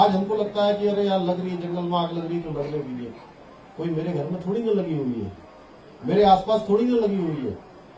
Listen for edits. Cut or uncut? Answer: uncut